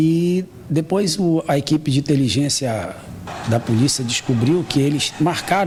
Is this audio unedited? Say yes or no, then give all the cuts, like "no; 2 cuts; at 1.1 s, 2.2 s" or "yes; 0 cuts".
yes; 0 cuts